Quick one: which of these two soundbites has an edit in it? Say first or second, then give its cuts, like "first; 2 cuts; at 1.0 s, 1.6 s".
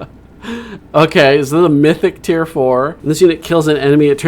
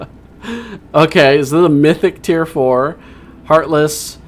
first; 1 cut; at 3.0 s